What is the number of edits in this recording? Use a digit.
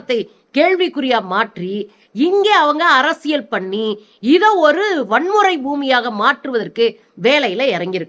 0